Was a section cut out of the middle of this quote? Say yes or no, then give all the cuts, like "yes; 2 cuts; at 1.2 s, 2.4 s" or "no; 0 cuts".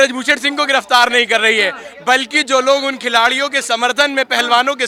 no; 0 cuts